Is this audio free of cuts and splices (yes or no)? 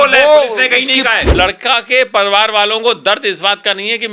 no